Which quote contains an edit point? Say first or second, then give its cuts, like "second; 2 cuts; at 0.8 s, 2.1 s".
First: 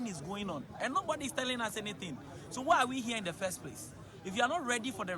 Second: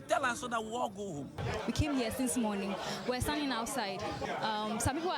second; 2 cuts; at 1.4 s, 4.2 s